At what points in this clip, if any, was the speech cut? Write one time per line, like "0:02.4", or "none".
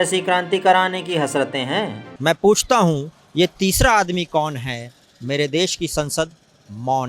0:02.0